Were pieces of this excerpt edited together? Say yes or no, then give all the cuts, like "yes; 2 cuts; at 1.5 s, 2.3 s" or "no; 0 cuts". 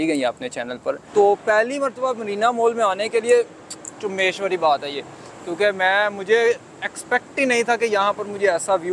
yes; 1 cut; at 1.0 s